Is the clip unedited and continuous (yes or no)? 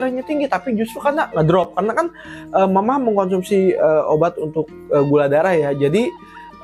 yes